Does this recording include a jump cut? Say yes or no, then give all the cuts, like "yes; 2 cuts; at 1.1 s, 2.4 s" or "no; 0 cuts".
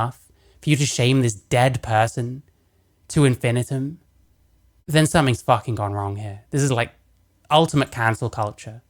no; 0 cuts